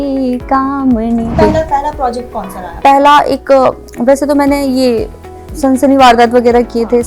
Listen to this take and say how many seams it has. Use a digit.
1